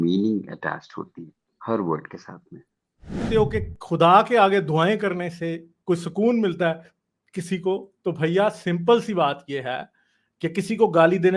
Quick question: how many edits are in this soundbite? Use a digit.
1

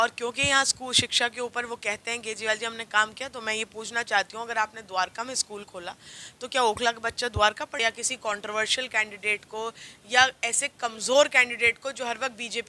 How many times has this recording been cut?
1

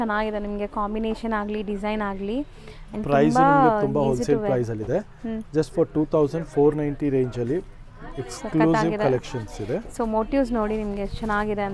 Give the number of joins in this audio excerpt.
0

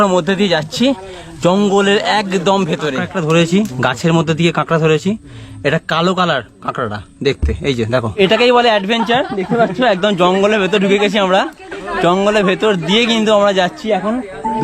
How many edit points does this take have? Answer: 2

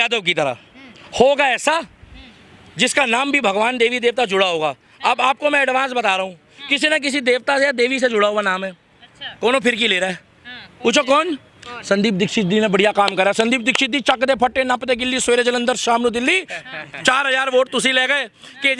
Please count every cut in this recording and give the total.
0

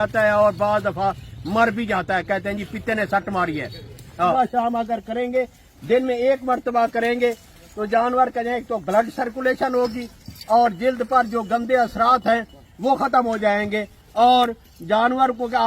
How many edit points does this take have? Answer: 1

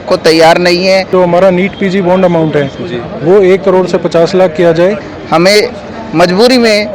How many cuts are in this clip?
2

